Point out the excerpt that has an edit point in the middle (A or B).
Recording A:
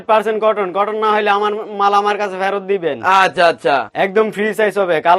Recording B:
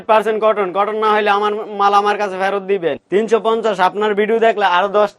B